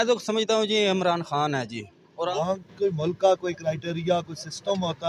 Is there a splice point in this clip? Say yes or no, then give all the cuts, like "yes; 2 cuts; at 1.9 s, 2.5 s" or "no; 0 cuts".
yes; 1 cut; at 2.3 s